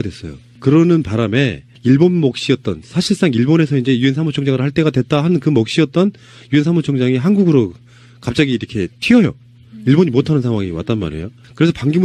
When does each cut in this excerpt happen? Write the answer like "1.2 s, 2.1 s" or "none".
none